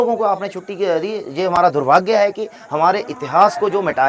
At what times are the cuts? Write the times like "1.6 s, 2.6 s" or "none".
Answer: none